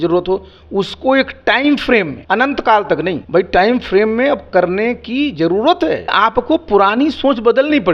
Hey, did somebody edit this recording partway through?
yes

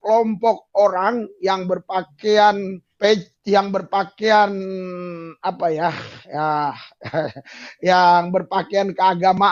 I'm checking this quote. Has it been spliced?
yes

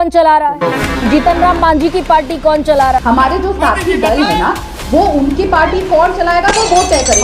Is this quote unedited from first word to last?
no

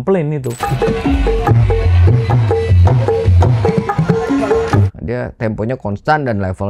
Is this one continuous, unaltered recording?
no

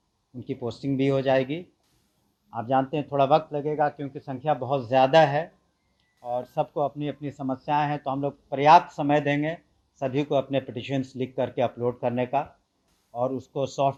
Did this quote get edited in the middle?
no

